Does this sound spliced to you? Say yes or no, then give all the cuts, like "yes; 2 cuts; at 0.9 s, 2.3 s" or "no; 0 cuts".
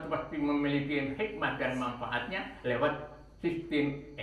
no; 0 cuts